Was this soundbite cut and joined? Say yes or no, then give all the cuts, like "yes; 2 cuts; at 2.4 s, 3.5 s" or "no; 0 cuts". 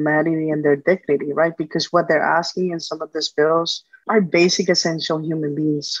no; 0 cuts